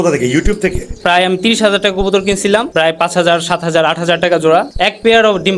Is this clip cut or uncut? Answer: cut